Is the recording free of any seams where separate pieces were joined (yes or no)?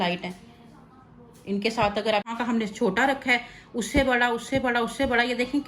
no